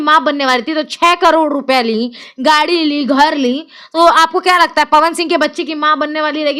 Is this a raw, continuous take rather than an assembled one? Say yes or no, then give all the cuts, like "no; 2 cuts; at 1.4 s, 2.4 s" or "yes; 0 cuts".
yes; 0 cuts